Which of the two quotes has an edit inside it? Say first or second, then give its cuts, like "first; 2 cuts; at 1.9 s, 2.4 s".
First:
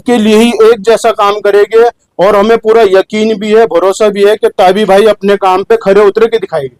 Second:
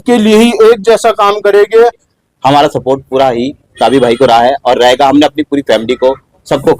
second; 1 cut; at 2.0 s